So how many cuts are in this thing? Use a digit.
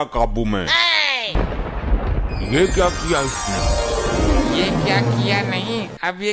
1